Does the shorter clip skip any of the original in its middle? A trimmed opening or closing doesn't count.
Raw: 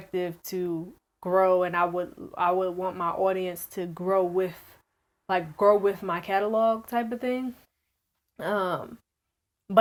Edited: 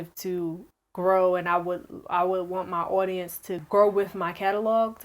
yes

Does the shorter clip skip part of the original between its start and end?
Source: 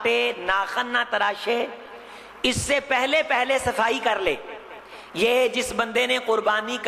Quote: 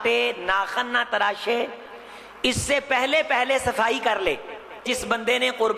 yes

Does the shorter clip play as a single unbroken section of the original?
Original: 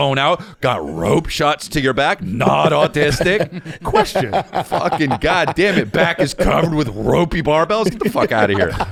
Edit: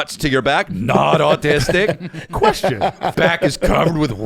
no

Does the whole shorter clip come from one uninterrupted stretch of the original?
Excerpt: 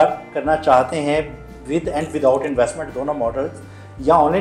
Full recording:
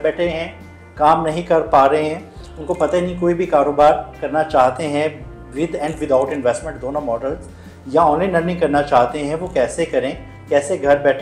yes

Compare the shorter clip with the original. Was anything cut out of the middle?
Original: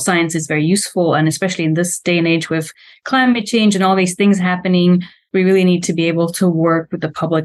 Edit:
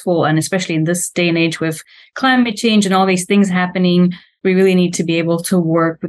no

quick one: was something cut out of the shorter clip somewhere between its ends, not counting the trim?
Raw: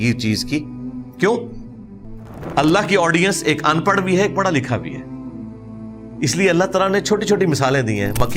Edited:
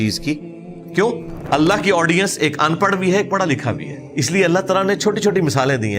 yes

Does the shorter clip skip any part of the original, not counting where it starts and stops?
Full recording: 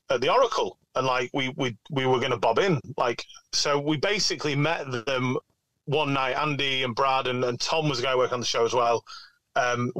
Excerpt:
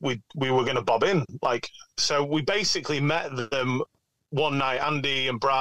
no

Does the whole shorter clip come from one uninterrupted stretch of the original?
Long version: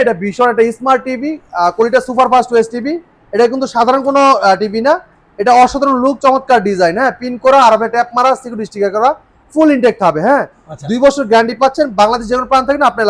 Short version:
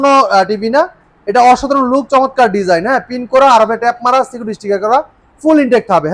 yes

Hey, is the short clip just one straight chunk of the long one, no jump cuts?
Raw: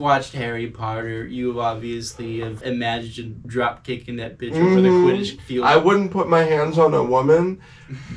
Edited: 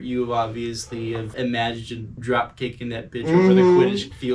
yes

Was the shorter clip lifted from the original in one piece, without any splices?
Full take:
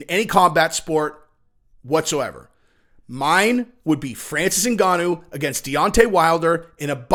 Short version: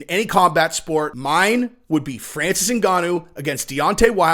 no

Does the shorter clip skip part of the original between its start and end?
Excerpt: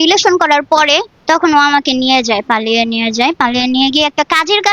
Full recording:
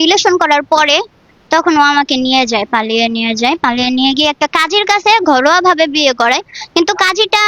yes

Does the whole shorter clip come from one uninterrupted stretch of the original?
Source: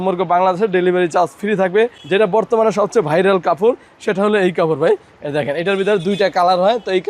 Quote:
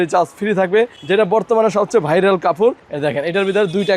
no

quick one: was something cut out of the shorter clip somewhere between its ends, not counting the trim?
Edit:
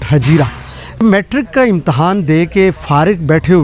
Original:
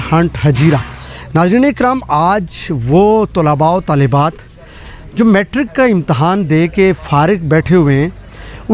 yes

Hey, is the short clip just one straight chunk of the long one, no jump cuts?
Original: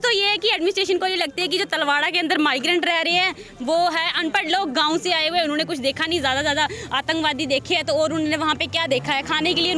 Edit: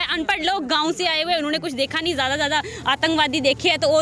yes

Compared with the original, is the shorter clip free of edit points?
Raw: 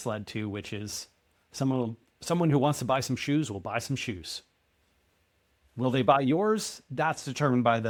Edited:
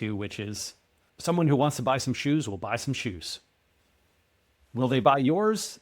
no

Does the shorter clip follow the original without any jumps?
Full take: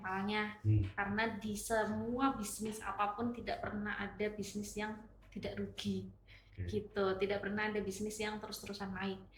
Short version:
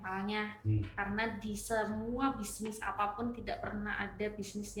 yes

